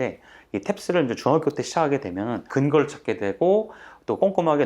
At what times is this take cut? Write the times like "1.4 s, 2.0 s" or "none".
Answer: 2.4 s

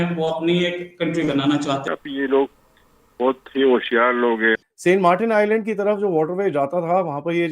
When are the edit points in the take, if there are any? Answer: 1.8 s

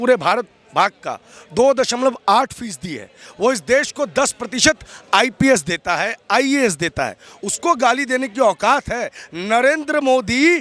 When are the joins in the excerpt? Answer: none

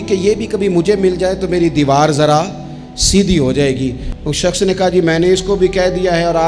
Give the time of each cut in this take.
4.1 s

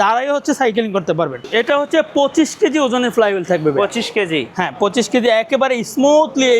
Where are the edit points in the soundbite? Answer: 1.4 s

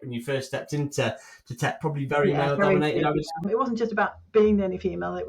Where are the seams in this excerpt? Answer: 3.5 s

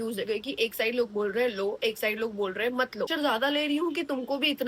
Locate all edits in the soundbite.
3.1 s

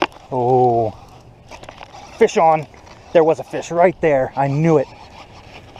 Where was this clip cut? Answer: none

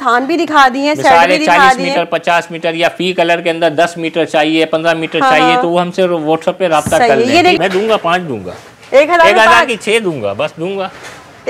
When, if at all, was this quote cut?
7.6 s

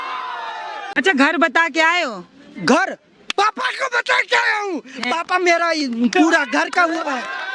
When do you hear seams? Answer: 1.0 s

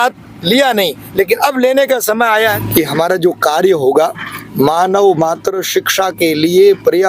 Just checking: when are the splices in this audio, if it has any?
2.6 s

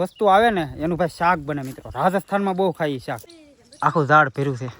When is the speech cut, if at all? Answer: 3.2 s

